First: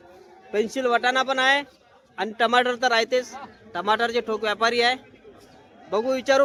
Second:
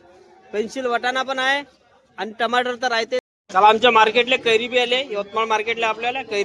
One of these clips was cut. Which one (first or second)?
second